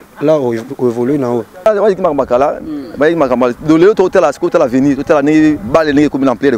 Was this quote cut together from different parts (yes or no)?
yes